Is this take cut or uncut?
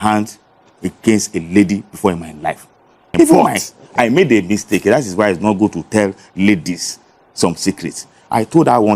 cut